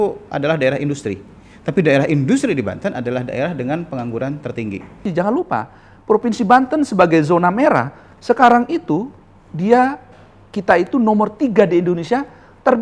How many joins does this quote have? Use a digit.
1